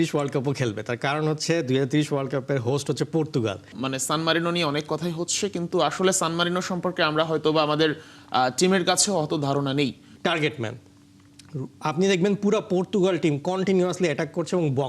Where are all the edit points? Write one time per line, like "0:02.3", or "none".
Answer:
0:03.8
0:10.1